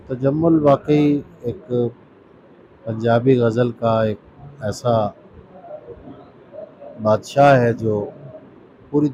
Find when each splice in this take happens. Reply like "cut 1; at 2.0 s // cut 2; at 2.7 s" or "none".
none